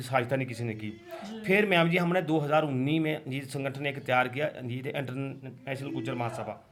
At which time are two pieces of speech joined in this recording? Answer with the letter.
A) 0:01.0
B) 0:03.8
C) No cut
C